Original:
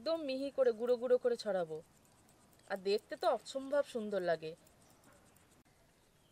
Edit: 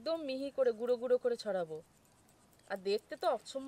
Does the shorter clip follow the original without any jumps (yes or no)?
yes